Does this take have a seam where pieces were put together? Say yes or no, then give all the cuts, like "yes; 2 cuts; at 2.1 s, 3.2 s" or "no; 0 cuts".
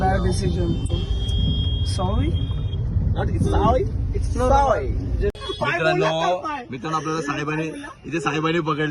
yes; 1 cut; at 5.4 s